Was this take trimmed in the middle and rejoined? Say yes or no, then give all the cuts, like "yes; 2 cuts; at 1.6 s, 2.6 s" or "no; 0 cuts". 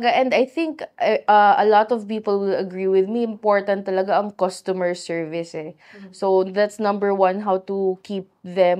no; 0 cuts